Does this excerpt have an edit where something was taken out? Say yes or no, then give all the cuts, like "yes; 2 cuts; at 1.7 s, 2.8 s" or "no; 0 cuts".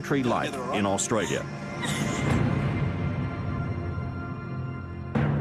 no; 0 cuts